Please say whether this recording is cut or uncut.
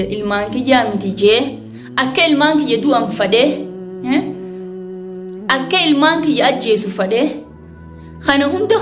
uncut